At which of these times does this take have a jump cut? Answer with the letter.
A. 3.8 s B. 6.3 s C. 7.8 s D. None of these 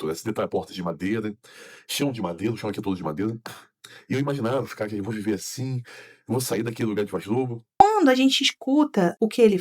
C